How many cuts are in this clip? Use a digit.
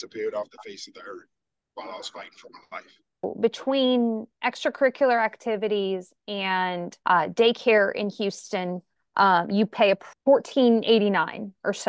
3